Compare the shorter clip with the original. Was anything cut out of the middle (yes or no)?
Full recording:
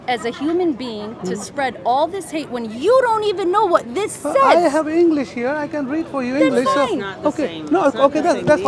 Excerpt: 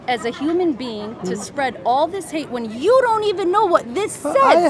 no